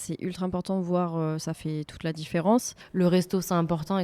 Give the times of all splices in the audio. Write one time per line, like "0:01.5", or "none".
0:02.7